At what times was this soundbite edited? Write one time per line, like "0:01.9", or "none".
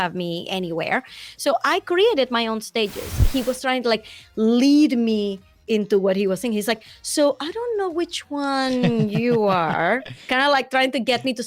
0:03.2